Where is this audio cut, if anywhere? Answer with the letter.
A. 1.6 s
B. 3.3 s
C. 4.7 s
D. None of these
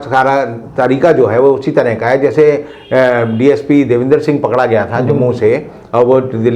D